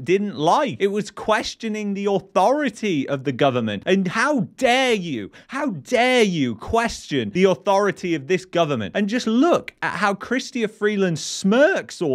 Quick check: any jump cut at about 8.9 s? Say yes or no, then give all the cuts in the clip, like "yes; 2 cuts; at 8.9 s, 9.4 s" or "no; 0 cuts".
yes; 1 cut; at 8.9 s